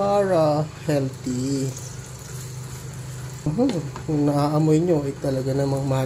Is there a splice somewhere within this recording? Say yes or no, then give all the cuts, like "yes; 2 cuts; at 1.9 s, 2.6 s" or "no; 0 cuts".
yes; 1 cut; at 3.5 s